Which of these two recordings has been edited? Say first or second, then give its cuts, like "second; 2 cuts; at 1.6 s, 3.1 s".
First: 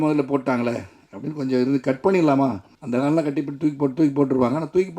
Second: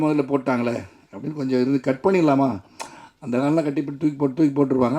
first; 1 cut; at 2.7 s